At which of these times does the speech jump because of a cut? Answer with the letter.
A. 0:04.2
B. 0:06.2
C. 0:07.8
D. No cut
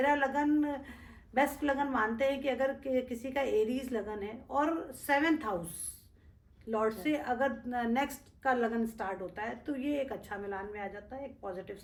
D